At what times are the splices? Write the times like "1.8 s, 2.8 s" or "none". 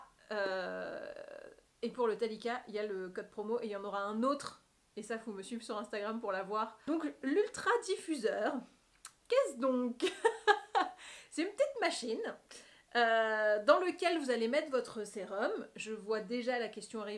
6.8 s